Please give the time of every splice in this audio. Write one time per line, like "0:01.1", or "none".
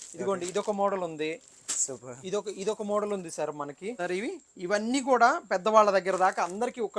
0:04.0